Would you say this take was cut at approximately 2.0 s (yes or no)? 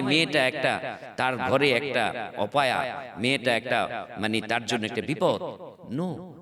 no